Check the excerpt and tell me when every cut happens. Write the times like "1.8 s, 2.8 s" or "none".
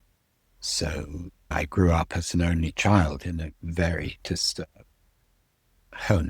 1.5 s

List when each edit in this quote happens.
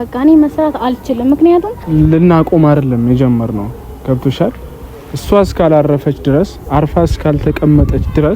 1.8 s

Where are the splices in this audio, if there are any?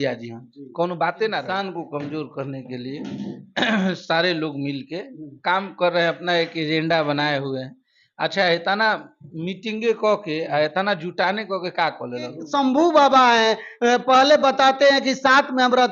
1.5 s, 12.4 s

